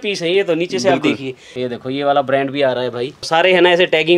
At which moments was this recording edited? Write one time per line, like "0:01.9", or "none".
0:01.5
0:03.3